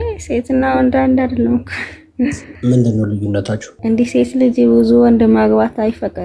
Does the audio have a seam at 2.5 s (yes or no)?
yes